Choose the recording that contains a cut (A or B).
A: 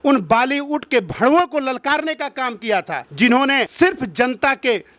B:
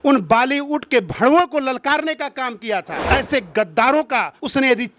B